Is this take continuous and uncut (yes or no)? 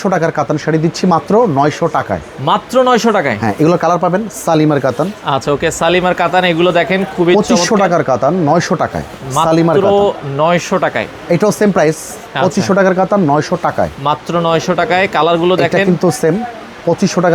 yes